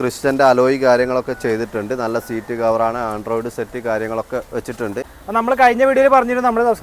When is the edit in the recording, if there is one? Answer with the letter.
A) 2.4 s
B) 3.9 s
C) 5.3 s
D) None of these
C